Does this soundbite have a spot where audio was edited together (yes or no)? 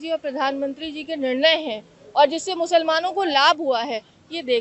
no